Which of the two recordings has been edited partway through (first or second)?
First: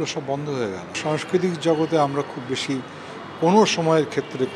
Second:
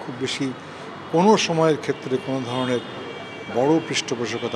first